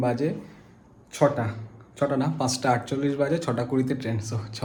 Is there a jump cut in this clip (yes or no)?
no